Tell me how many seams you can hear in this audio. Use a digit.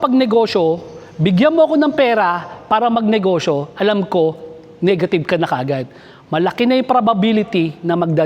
0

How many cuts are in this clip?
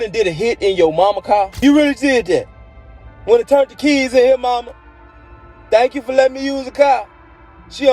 1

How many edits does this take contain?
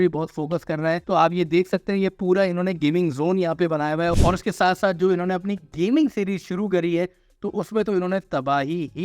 2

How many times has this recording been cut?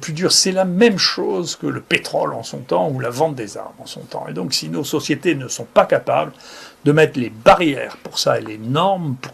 0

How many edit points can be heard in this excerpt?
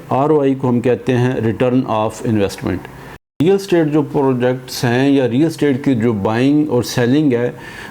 1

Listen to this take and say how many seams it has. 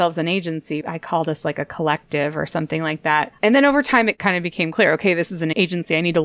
3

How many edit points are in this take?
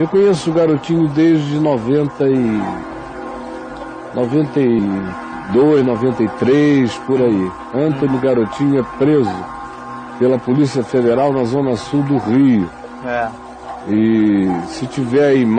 1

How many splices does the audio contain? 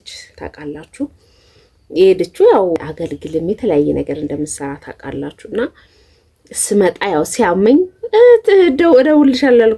1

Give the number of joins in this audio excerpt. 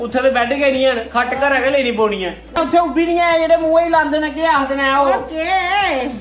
1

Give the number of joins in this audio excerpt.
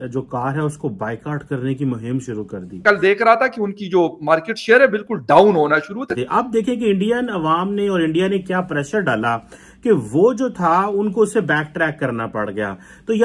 2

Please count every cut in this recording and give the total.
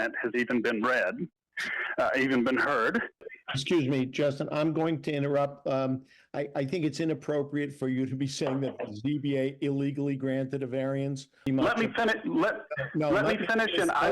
2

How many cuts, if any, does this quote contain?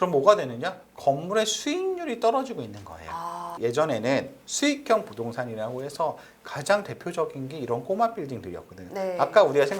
0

